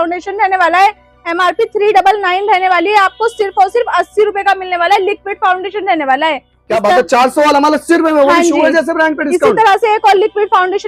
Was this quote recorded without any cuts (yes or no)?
yes